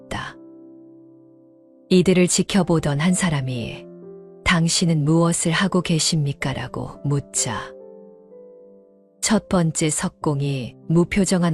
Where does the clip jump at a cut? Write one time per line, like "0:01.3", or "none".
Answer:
none